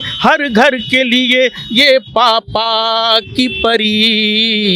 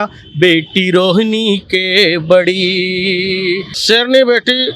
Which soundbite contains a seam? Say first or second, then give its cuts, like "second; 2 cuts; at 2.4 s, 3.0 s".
second; 1 cut; at 3.7 s